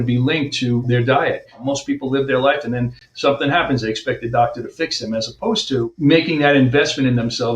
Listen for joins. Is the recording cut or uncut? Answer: cut